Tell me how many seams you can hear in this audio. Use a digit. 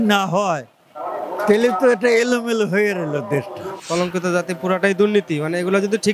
1